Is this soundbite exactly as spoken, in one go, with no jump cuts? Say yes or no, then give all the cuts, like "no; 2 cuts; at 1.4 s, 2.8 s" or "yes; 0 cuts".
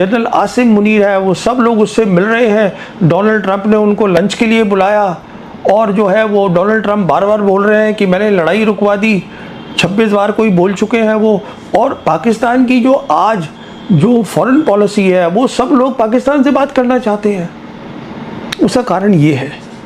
yes; 0 cuts